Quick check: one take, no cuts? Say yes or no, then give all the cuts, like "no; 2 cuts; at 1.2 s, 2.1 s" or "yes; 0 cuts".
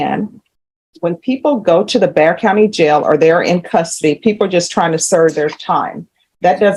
yes; 0 cuts